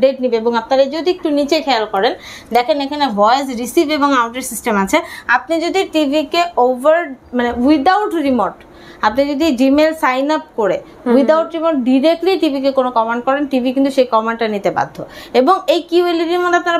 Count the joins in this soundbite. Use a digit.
0